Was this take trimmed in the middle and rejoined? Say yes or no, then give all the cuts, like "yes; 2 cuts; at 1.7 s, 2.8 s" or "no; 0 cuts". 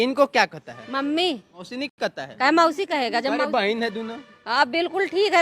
yes; 1 cut; at 2.0 s